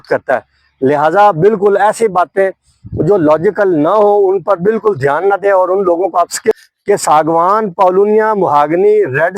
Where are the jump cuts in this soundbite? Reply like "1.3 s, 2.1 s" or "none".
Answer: 6.6 s